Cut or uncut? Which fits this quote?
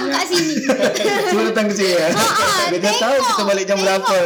uncut